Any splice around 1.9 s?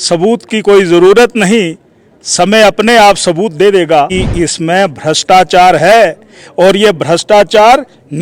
no; 1 cut; at 4.1 s

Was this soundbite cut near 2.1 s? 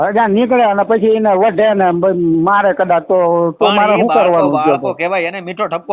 no; 0 cuts

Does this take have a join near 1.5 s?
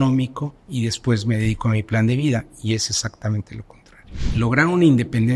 no; 1 cut; at 4.2 s

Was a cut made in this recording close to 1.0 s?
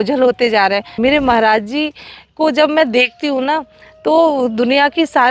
yes; 1 cut; at 1.0 s

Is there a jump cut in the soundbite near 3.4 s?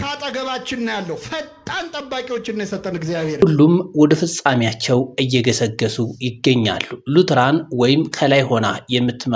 yes; 1 cut; at 3.4 s

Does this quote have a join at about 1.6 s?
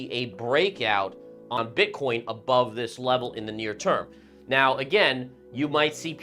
yes; 1 cut; at 1.6 s

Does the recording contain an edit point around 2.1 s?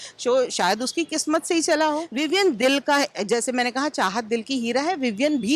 yes; 1 cut; at 2.1 s

